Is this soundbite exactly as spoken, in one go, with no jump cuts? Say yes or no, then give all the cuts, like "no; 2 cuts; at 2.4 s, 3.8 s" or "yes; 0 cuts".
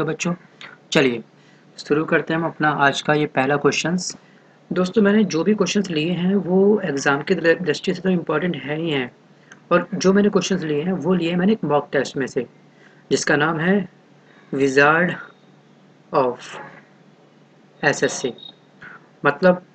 yes; 0 cuts